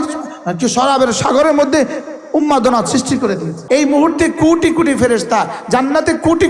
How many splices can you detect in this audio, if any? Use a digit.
1